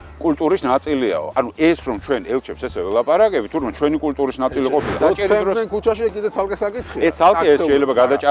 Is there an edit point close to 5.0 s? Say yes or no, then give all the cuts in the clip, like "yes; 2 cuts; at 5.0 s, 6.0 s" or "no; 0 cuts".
yes; 1 cut; at 5.0 s